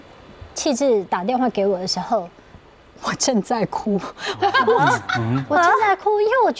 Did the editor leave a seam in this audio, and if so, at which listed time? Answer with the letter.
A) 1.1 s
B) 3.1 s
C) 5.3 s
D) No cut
A